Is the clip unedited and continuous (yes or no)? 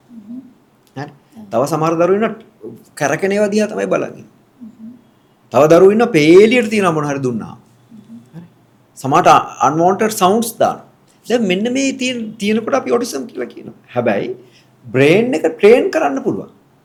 yes